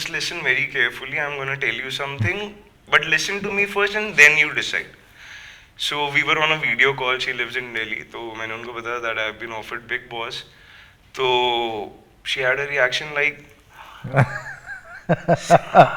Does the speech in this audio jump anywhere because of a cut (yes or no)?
no